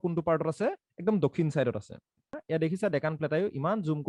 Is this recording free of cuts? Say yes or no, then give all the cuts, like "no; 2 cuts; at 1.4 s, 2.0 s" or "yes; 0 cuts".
no; 1 cut; at 2.4 s